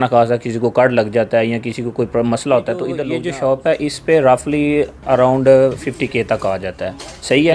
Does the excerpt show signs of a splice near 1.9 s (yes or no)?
no